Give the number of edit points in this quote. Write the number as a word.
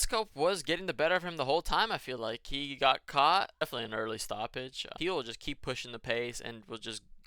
two